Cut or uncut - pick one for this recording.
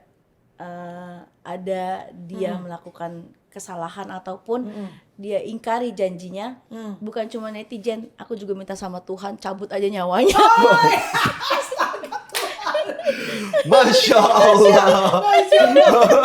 uncut